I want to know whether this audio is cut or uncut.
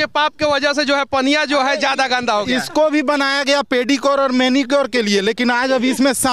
uncut